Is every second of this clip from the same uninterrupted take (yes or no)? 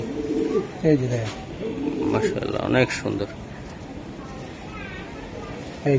yes